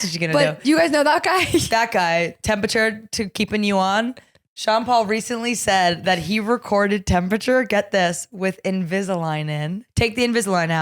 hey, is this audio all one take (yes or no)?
no